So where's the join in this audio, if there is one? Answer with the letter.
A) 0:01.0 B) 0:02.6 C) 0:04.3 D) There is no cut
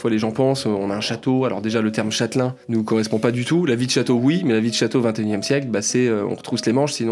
B